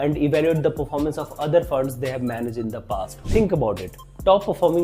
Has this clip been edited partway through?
yes; 1 cut; at 3.1 s

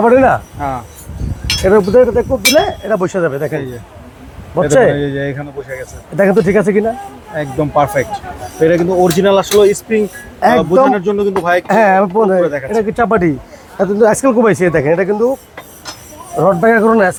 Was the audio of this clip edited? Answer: no; 0 cuts

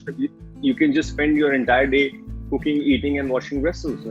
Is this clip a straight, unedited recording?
yes; 0 cuts

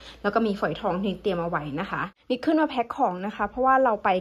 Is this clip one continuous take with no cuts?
no; 1 cut; at 2.1 s

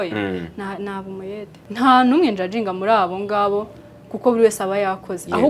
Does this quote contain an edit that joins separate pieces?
yes; 1 cut; at 1.6 s

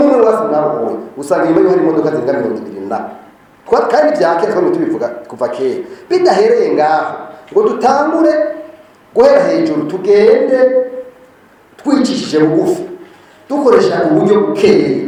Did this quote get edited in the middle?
no; 0 cuts

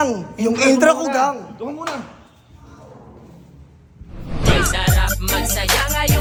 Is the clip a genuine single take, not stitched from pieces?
yes; 0 cuts

